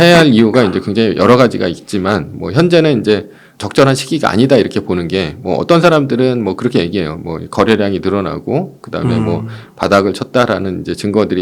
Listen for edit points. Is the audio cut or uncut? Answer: uncut